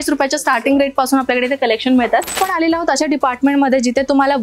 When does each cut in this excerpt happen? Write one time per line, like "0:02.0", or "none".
0:02.4